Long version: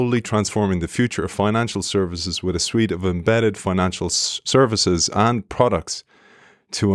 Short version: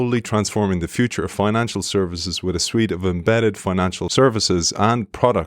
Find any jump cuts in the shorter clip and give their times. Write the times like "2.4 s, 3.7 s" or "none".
4.0 s